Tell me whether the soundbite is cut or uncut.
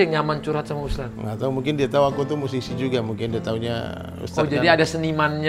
uncut